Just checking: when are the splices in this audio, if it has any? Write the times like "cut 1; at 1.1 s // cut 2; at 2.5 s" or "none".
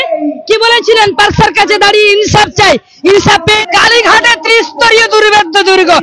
cut 1; at 3.6 s